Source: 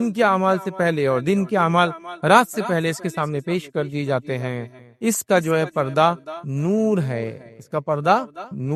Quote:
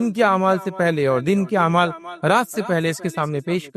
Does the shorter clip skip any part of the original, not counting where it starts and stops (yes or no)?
no